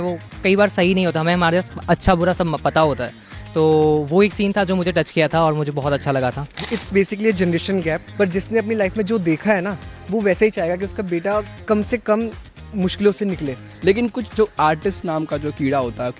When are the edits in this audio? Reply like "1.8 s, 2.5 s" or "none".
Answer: 6.6 s, 8.1 s, 13.6 s